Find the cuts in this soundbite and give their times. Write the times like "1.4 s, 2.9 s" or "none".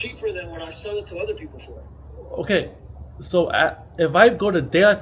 none